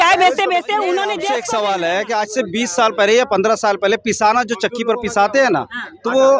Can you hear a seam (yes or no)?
yes